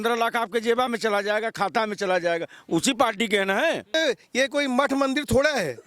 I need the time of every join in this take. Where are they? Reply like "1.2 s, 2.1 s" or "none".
3.9 s